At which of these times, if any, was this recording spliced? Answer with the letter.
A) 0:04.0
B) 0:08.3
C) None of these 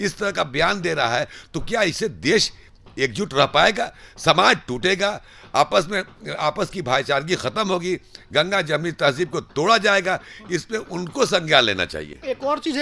C